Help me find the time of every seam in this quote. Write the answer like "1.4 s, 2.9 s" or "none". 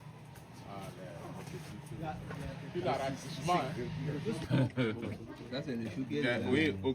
4.4 s